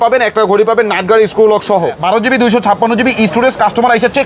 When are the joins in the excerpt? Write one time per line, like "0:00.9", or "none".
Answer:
0:02.0

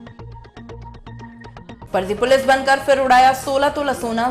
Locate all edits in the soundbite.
0:01.7

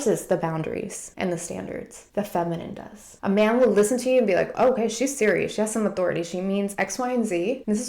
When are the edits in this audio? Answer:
none

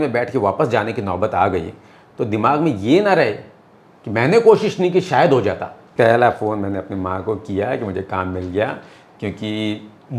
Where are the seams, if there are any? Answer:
0:05.8

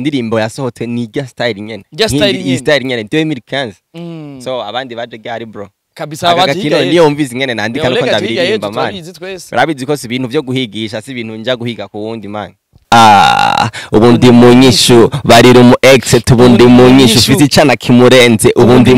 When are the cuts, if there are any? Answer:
0:12.8

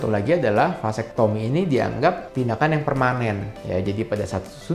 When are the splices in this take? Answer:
none

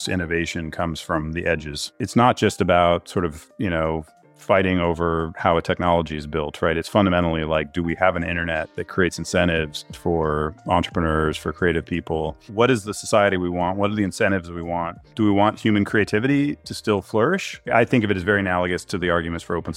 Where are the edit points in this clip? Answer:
0:01.9
0:09.9
0:12.5
0:15.1
0:17.7

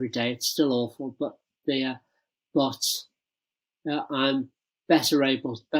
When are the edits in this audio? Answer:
none

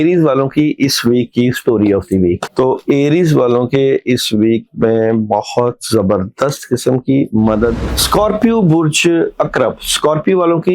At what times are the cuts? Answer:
0:02.4
0:07.8

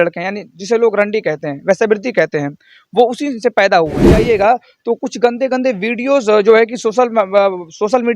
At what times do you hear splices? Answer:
0:04.1

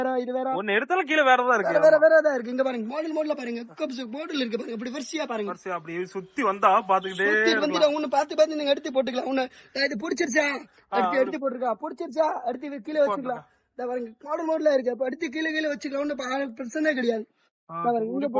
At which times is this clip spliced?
none

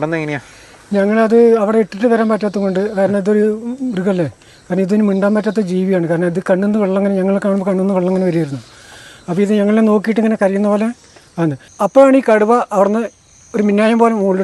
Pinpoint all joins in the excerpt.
0:11.6

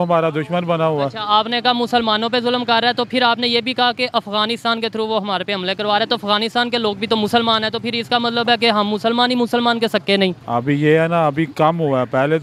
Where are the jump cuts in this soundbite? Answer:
none

